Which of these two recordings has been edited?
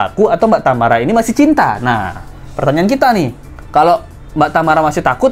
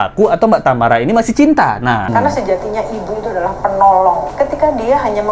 second; 2 cuts; at 2.1 s, 4.3 s

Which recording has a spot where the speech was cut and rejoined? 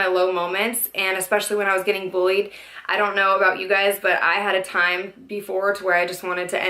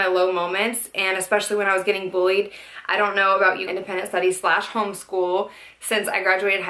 first; 1 cut; at 3.6 s

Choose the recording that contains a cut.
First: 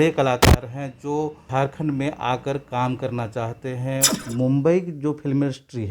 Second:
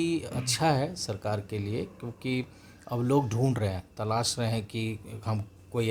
first; 2 cuts; at 1.4 s, 4.2 s

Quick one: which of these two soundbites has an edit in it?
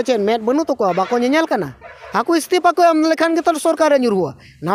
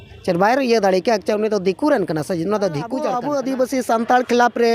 second; 1 cut; at 3.2 s

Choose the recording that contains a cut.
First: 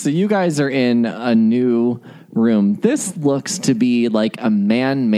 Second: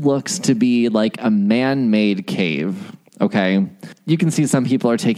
second; 1 cut; at 3.9 s

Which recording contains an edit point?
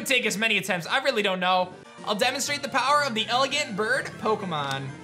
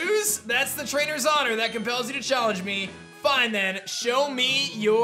first; 1 cut; at 1.9 s

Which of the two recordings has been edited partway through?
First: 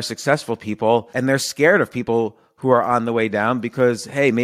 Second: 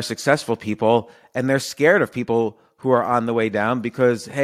first; 1 cut; at 1.1 s

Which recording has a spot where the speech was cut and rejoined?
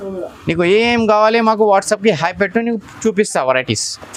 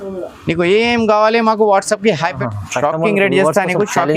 second; 1 cut; at 2.4 s

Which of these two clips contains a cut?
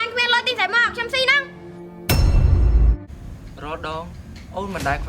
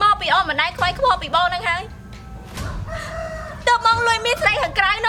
first; 1 cut; at 3.0 s

